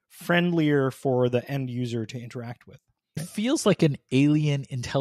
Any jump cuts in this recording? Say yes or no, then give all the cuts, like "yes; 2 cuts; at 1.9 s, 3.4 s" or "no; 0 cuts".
yes; 1 cut; at 3.3 s